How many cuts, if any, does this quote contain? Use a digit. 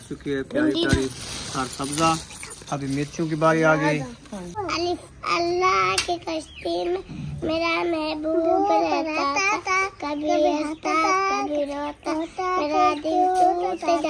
1